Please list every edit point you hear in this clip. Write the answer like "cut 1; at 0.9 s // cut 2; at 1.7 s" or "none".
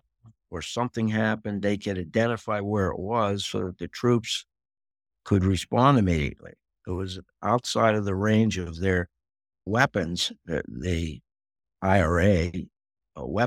cut 1; at 6.7 s